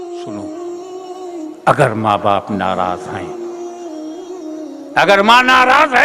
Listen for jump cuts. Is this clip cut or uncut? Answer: cut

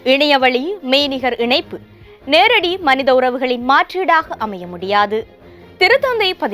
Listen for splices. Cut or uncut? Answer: uncut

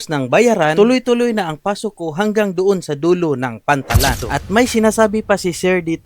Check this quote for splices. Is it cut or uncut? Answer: cut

